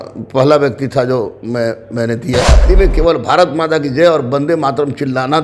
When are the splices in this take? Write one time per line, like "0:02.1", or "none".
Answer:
0:02.6

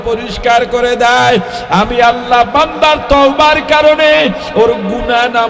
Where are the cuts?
none

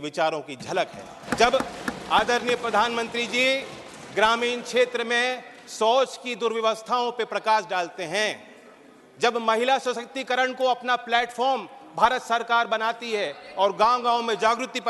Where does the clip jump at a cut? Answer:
0:01.2

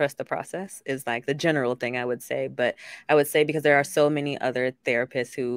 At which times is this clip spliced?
0:01.2

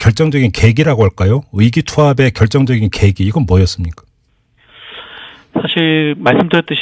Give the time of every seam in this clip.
0:03.4

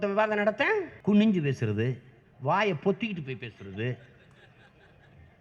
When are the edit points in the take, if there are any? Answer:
0:00.9

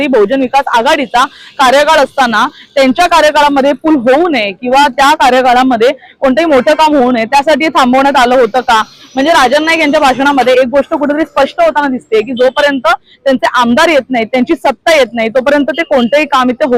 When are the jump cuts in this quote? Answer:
none

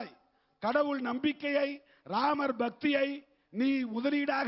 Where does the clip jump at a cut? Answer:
none

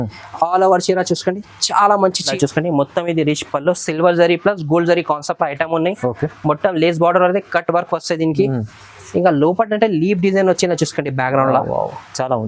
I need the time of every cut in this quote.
0:02.3

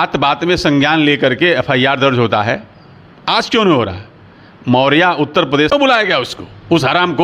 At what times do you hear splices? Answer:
0:05.7

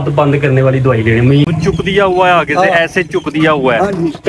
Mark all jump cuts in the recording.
0:01.5

